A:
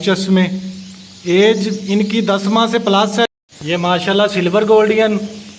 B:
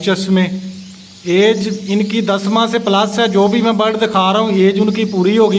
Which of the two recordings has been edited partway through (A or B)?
A